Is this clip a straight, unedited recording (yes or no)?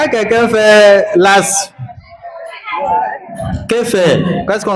yes